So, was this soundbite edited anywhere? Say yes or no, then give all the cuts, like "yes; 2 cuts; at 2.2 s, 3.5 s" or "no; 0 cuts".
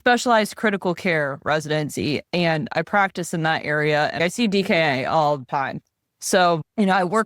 yes; 2 cuts; at 4.2 s, 5.5 s